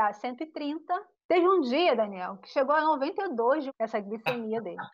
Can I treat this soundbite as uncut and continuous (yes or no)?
no